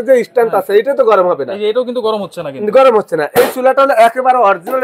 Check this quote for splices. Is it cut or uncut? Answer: uncut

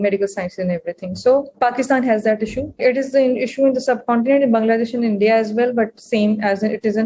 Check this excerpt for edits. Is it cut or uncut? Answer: cut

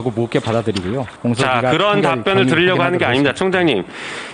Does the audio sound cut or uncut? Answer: cut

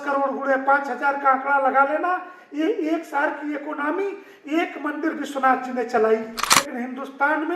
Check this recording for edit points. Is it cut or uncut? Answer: cut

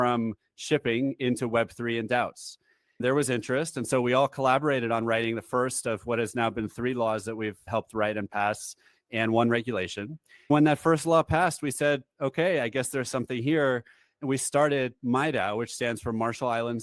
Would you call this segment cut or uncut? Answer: uncut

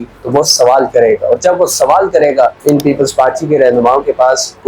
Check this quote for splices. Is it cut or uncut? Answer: uncut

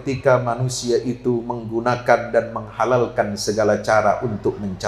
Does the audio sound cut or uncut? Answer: uncut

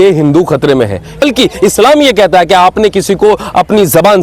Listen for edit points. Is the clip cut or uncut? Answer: cut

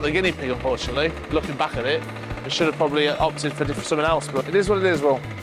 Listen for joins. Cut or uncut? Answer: uncut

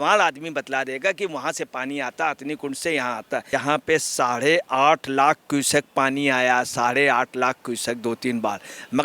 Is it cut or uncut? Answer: cut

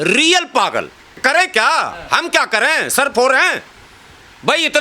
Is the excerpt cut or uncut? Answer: cut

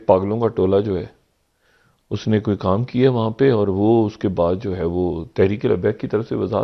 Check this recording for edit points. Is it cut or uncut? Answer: uncut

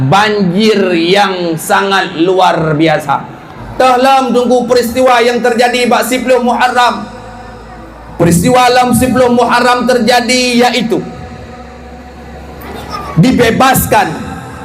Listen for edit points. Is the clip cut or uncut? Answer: cut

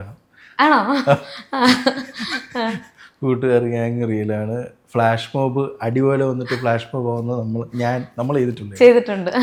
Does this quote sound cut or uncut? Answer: uncut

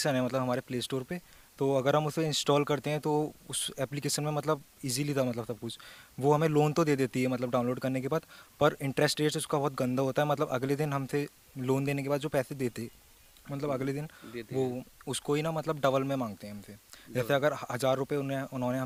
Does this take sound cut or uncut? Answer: uncut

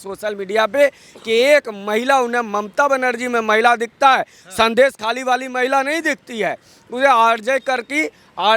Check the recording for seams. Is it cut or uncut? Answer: uncut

